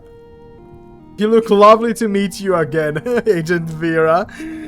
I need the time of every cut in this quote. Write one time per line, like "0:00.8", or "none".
0:01.2